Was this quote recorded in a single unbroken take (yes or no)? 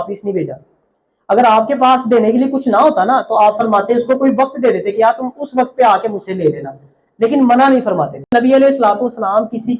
no